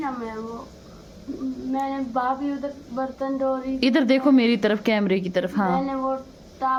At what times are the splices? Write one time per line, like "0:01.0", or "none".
none